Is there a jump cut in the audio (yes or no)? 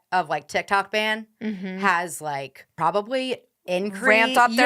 yes